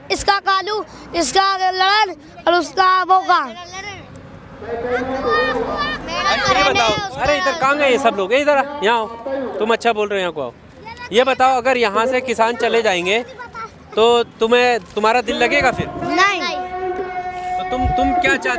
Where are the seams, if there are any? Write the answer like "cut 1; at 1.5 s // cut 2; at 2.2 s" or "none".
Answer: none